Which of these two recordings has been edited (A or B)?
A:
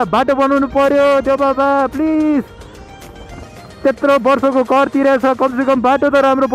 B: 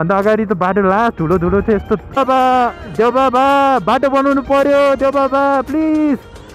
B